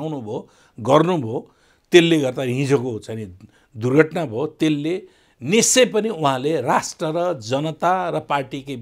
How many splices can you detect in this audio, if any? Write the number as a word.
zero